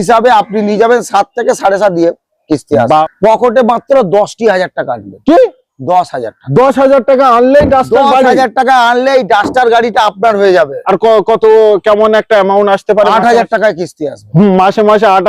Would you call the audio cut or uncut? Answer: cut